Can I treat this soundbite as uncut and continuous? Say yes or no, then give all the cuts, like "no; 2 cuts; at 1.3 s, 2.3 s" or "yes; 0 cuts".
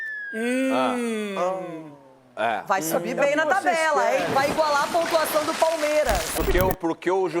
no; 1 cut; at 6.3 s